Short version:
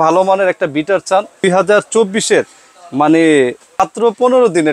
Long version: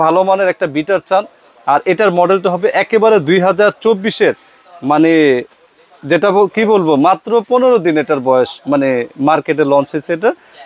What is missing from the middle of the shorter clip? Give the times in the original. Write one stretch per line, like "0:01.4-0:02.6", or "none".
0:01.4-0:03.3
0:05.7-0:07.1

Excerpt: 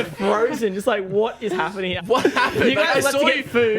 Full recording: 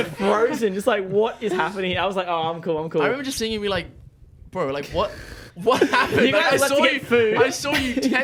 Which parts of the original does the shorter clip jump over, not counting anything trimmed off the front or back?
0:01.9-0:05.5

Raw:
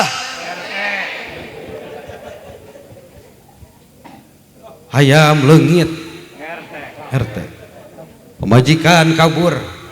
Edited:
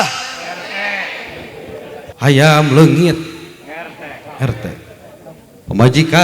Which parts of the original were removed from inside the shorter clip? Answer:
0:02.1-0:04.8

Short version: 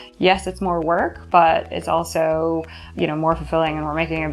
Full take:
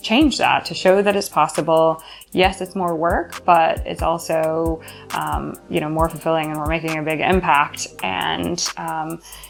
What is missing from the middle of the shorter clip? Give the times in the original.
0:05.0-0:05.5

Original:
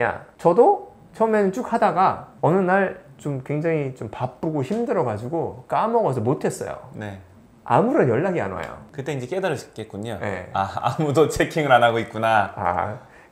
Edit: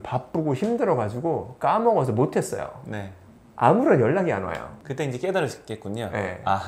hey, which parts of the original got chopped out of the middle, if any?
none

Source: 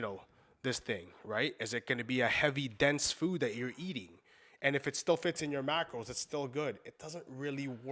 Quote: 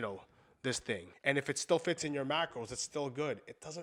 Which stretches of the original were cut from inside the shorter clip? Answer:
0:01.1-0:04.5

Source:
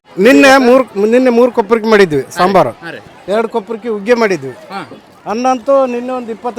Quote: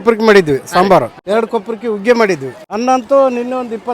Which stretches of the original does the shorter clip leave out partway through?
0:02.8-0:03.2
0:04.6-0:05.1

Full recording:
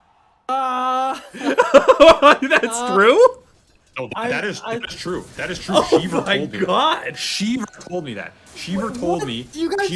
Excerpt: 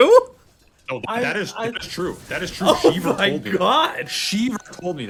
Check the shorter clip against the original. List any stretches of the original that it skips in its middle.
none

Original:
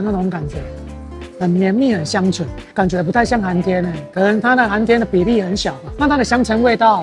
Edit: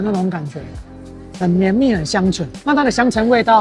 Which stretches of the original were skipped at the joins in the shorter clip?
0:02.5-0:05.8

